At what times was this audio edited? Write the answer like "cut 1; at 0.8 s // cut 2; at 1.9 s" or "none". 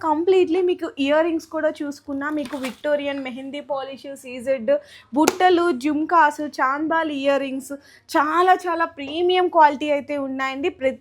none